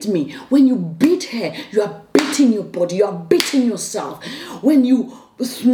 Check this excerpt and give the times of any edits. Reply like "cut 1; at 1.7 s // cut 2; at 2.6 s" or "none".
none